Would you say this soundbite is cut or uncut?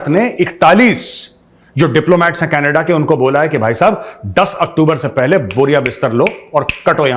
uncut